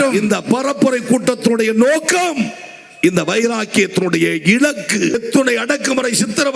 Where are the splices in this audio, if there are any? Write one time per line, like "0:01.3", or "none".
0:05.1